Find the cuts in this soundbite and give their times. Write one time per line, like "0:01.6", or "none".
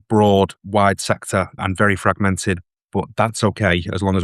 0:01.6